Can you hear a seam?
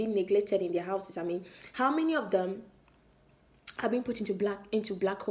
no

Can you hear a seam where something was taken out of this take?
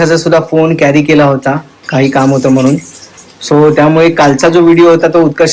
no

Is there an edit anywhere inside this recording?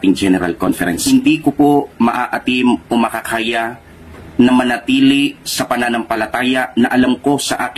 yes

